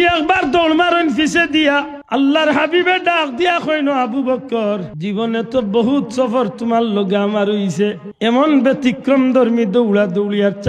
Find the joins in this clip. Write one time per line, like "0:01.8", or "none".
0:02.0
0:04.9
0:08.1